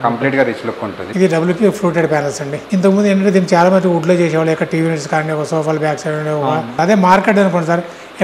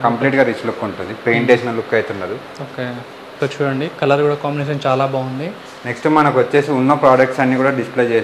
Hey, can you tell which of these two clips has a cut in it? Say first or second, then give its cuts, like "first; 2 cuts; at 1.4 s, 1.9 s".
first; 3 cuts; at 1.1 s, 2.5 s, 6.8 s